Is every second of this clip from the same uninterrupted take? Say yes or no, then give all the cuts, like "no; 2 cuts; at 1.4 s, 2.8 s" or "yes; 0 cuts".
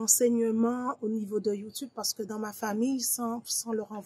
yes; 0 cuts